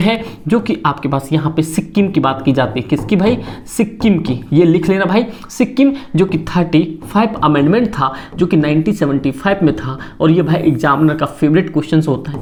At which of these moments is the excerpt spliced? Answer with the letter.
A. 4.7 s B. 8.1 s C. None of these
C